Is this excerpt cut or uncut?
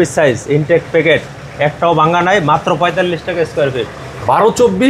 uncut